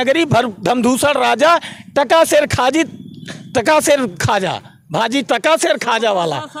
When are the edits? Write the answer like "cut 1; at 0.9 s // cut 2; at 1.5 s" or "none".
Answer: none